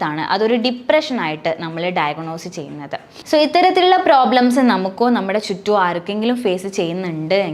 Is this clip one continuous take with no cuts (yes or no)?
no